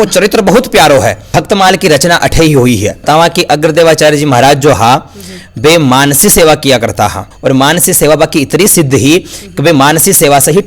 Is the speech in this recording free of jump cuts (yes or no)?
no